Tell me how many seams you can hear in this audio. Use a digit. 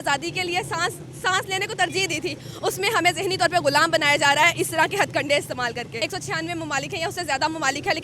1